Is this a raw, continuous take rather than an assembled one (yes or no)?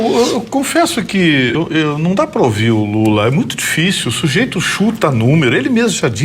no